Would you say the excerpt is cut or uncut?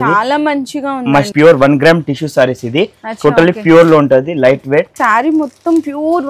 cut